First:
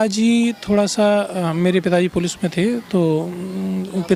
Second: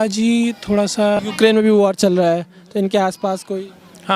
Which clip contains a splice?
second; 1 cut; at 1.2 s

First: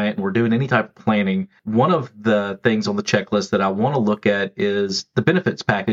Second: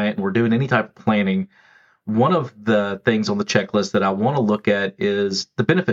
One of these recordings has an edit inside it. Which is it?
first; 1 cut; at 1.5 s

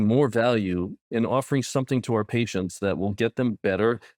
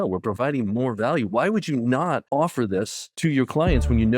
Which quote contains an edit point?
second; 2 cuts; at 2.2 s, 3.0 s

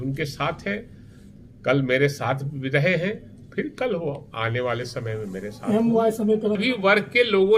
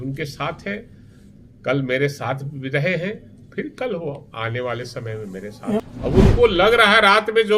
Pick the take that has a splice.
second; 1 cut; at 5.8 s

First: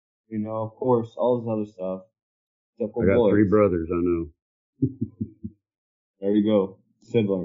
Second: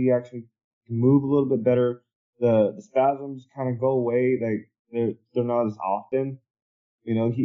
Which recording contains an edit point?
second; 1 cut; at 6.0 s

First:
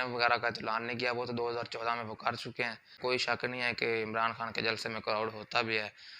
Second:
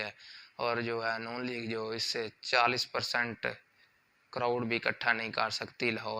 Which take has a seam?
first; 1 cut; at 3.0 s

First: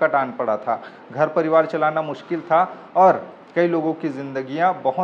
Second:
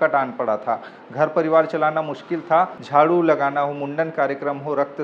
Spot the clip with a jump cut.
second; 1 cut; at 2.8 s

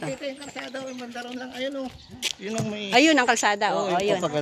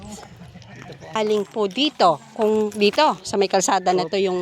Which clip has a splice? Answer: second; 1 cut; at 1.2 s

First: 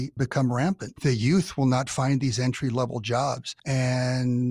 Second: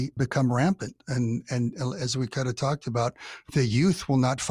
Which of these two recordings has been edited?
first; 2 cuts; at 0.9 s, 3.5 s

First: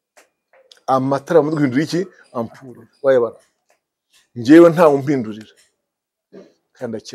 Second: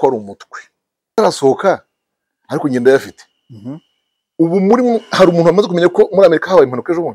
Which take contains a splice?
second; 1 cut; at 1.1 s

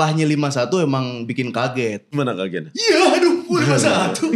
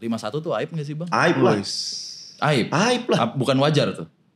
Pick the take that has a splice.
first; 1 cut; at 2.1 s

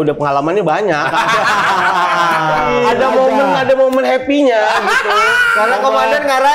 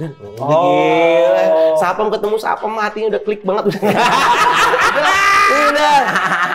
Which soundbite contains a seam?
first; 1 cut; at 2.7 s

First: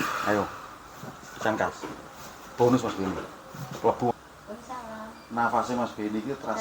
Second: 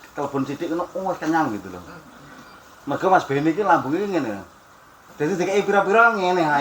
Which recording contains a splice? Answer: first; 1 cut; at 4.1 s

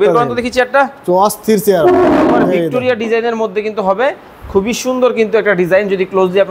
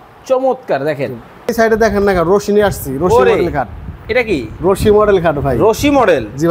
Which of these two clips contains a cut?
second; 1 cut; at 1.5 s

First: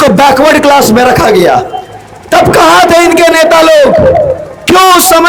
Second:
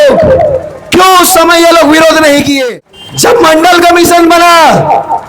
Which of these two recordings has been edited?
second; 1 cut; at 2.6 s

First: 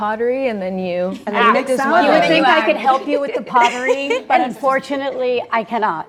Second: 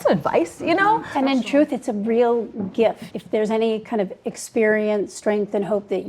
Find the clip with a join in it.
second; 2 cuts; at 1.1 s, 3.1 s

